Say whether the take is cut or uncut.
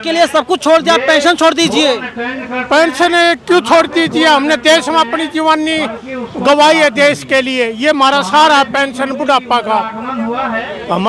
uncut